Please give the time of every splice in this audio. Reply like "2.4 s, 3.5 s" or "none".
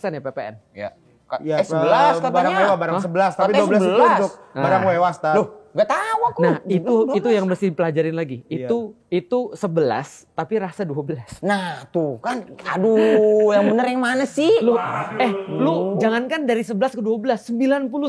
none